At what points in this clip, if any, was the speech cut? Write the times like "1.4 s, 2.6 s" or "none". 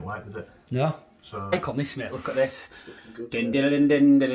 1.5 s